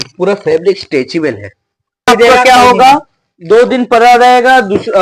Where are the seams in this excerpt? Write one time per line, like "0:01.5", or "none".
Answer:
0:02.1